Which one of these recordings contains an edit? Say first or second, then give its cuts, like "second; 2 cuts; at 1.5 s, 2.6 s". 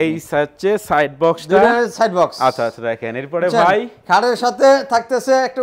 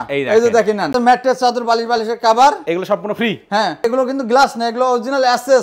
second; 2 cuts; at 0.9 s, 3.8 s